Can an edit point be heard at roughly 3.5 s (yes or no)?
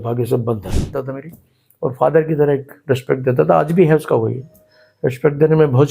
no